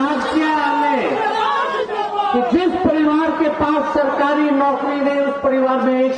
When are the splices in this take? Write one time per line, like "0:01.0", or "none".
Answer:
none